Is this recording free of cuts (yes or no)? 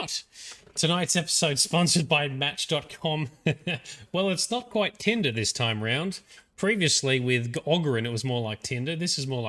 yes